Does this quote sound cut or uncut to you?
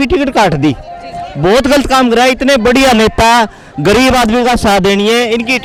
uncut